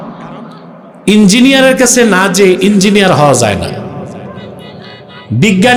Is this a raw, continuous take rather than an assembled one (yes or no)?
yes